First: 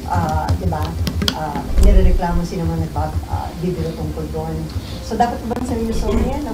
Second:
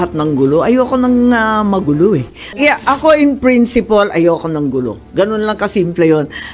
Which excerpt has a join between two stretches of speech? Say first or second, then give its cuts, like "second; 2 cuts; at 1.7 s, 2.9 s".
second; 1 cut; at 2.4 s